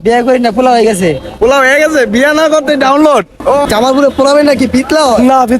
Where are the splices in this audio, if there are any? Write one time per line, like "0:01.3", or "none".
0:03.6

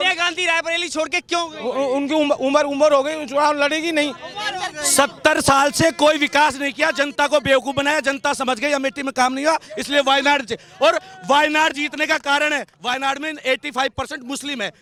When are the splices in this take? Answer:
none

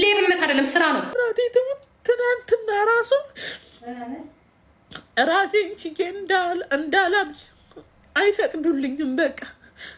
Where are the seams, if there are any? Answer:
0:01.1

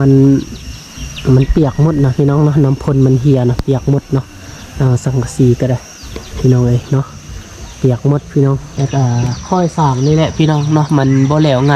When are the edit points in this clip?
0:08.7

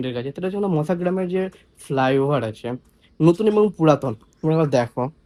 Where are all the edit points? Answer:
none

